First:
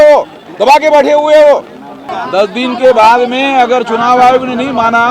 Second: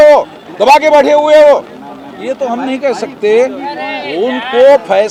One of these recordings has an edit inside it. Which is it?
first; 1 cut; at 2.1 s

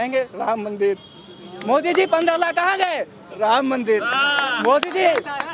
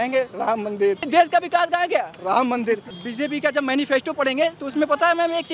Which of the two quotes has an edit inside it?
second; 2 cuts; at 1.1 s, 2.9 s

